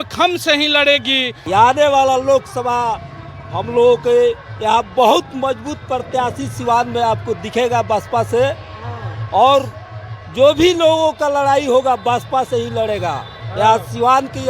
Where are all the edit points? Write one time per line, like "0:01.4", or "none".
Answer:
0:01.3